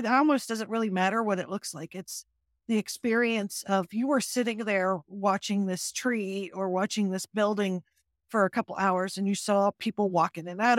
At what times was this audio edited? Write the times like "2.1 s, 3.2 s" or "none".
none